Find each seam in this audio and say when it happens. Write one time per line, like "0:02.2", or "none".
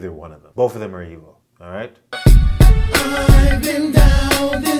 0:02.0